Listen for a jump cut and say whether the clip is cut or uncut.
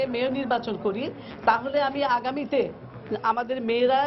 uncut